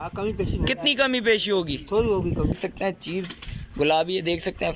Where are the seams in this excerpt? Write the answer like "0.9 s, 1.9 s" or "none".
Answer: 2.6 s